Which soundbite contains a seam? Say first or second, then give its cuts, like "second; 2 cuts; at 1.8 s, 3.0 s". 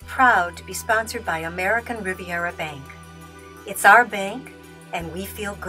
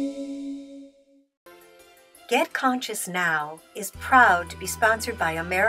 second; 1 cut; at 2.2 s